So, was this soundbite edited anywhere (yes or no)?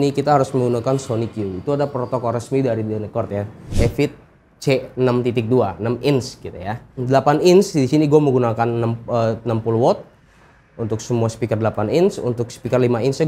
yes